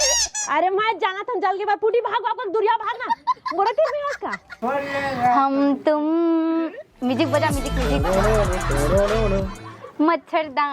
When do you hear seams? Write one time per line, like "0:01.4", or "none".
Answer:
0:04.5